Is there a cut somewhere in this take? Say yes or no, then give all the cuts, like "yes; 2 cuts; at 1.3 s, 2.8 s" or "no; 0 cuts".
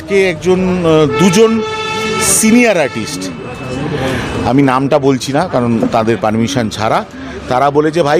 no; 0 cuts